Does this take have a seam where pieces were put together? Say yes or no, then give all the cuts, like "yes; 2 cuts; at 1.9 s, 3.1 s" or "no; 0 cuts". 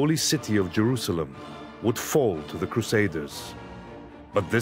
no; 0 cuts